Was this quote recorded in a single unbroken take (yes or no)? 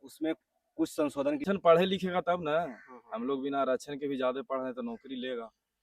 no